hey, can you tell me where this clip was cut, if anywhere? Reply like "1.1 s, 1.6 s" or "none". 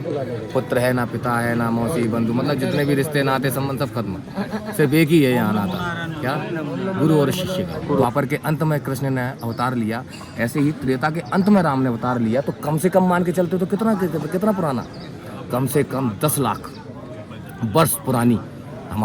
8.0 s

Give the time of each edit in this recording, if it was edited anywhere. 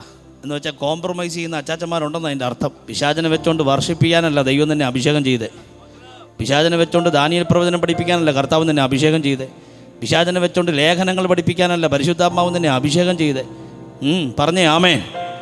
2.8 s

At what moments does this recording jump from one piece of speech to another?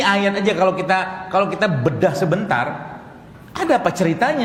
none

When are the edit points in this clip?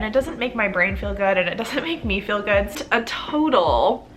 2.8 s

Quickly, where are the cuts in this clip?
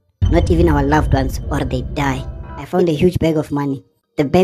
2.7 s

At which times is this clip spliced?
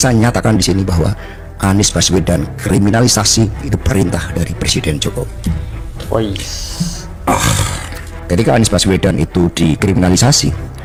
none

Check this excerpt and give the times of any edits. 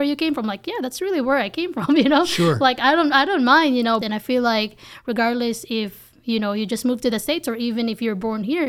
4.0 s

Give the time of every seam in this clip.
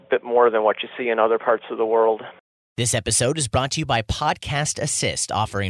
2.4 s

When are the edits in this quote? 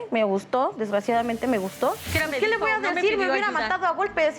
2.1 s

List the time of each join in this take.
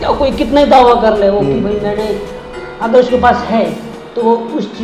none

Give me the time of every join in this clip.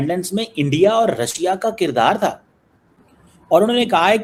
none

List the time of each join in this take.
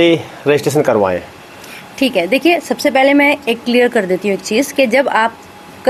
none

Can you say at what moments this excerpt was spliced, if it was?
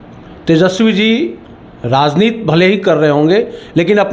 none

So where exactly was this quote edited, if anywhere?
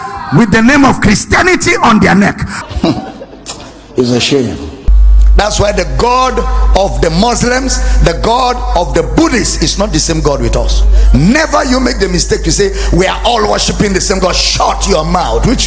none

